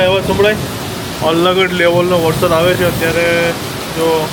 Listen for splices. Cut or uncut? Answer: uncut